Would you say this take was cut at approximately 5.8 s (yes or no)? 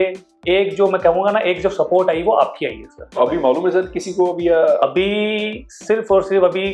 no